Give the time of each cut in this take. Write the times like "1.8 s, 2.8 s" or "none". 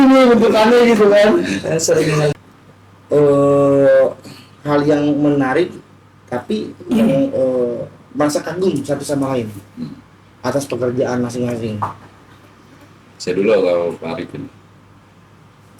2.3 s